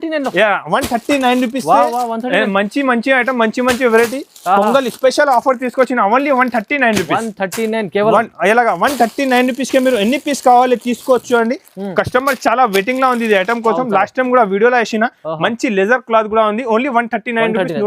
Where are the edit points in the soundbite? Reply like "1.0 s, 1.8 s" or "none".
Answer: none